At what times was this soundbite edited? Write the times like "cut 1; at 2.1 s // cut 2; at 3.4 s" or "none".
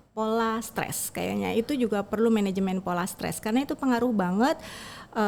none